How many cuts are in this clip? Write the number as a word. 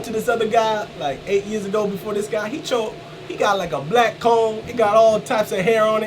one